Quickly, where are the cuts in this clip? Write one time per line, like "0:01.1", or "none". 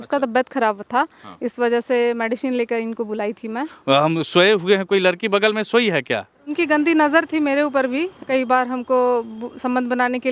0:03.7
0:06.5
0:08.2